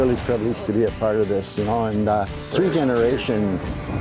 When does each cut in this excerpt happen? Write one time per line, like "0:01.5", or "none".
none

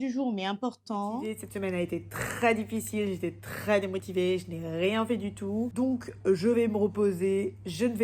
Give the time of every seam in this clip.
0:01.3
0:05.7

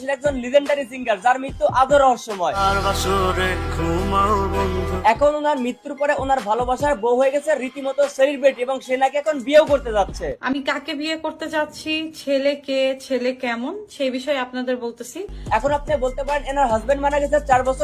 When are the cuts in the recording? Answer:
none

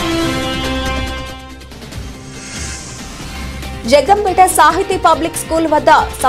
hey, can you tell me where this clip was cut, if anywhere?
0:03.2

